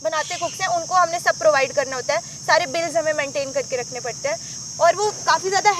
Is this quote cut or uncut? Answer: uncut